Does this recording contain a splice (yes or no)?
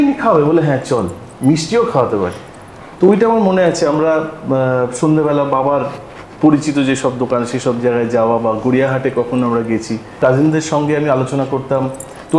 yes